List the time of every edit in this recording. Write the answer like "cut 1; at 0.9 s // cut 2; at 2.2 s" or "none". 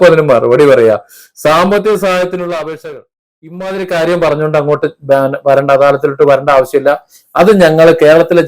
cut 1; at 3.6 s

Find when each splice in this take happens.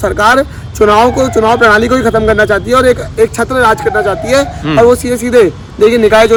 none

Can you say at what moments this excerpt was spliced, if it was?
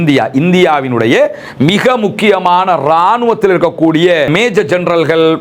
cut 1; at 4.3 s

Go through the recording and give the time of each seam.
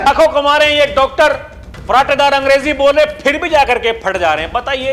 none

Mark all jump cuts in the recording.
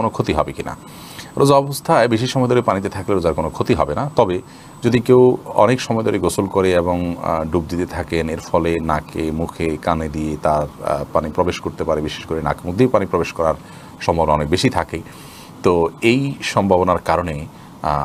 none

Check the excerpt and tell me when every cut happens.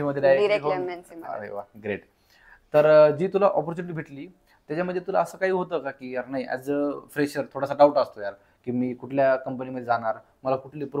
none

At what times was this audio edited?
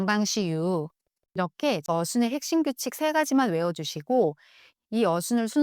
cut 1; at 1.9 s

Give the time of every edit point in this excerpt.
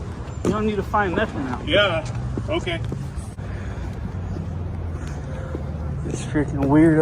cut 1; at 3.4 s

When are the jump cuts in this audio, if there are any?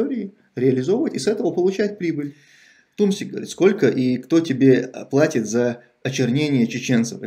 cut 1; at 2.8 s

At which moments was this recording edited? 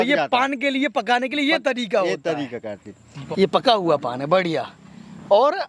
cut 1; at 3.1 s

